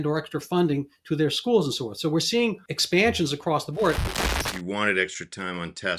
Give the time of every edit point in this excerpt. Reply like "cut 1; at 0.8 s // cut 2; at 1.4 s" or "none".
cut 1; at 2.7 s // cut 2; at 4.0 s